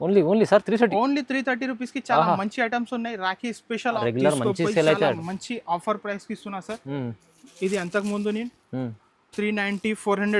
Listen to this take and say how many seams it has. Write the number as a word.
one